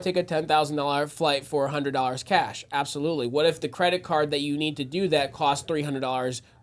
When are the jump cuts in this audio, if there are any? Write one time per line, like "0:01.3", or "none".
none